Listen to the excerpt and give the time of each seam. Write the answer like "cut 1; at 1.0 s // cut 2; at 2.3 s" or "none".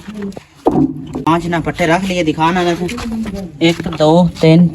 cut 1; at 1.3 s